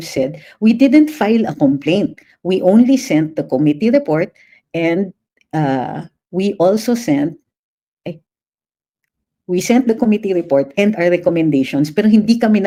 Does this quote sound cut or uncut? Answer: uncut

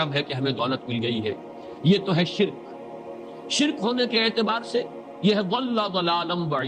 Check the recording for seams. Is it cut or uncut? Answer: uncut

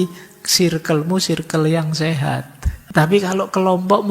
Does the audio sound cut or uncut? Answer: cut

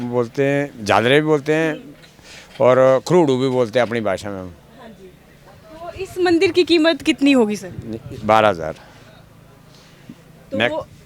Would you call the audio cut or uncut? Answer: uncut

